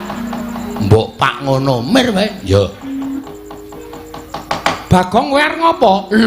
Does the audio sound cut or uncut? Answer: cut